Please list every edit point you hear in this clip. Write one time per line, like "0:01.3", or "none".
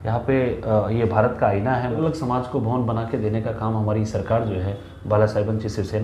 0:02.0